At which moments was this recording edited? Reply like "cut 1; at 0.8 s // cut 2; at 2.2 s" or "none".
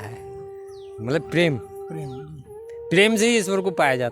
none